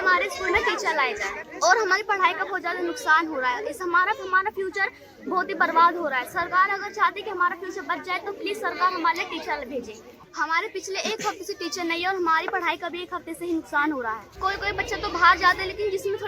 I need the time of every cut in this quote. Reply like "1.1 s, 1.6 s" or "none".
none